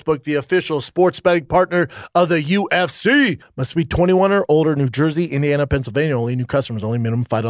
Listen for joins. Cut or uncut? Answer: cut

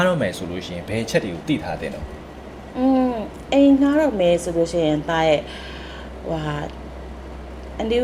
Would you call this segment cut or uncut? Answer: uncut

